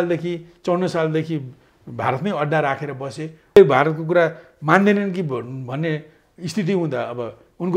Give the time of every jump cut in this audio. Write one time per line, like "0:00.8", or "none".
0:03.6